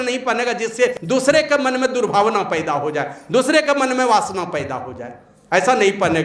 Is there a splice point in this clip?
yes; 1 cut; at 1.0 s

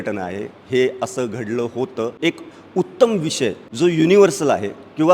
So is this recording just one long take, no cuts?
no; 2 cuts; at 2.1 s, 3.6 s

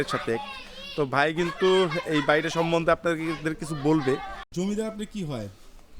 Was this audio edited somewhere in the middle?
yes; 1 cut; at 4.4 s

